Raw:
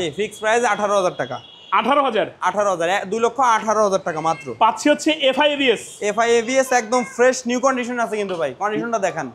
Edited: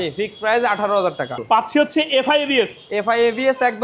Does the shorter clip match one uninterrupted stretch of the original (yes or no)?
no